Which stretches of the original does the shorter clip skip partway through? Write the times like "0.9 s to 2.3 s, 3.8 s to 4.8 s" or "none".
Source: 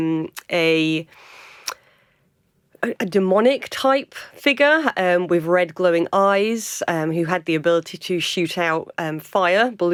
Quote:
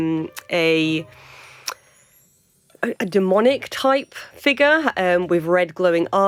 none